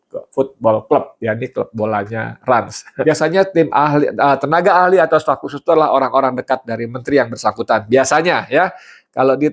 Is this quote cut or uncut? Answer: cut